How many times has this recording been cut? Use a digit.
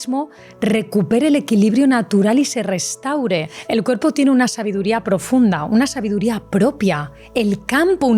2